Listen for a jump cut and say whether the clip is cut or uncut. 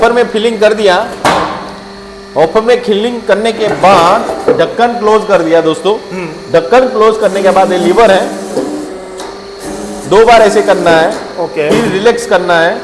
uncut